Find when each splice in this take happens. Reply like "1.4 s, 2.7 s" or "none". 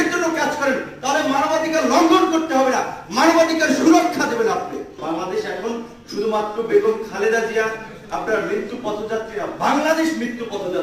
5.0 s